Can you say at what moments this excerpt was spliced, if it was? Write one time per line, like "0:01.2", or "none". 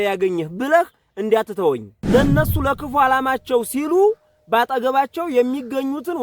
0:01.9